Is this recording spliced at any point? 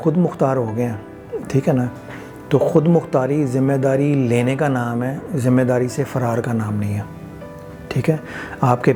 no; 0 cuts

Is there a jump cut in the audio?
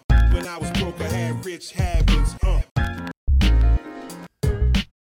no; 0 cuts

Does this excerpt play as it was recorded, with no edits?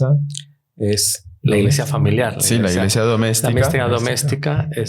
no; 1 cut; at 1.4 s

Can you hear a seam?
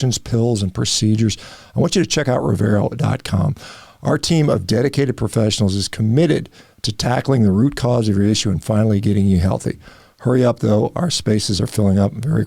no; 0 cuts

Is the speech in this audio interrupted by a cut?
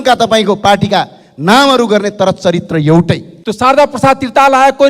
yes; 1 cut; at 3.4 s

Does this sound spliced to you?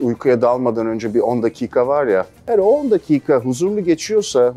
yes; 1 cut; at 2.5 s

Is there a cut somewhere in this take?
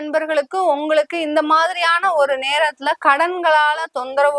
no; 0 cuts

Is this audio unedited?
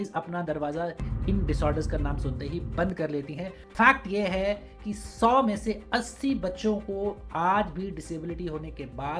no; 1 cut; at 3.6 s

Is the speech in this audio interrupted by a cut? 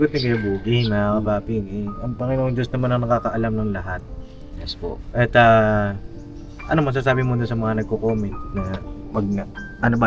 no; 0 cuts

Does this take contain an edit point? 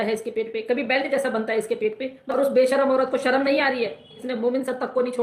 yes; 2 cuts; at 2.2 s, 4.2 s

